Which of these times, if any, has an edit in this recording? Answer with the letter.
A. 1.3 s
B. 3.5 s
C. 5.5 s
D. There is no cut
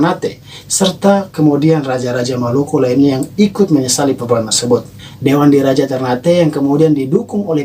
D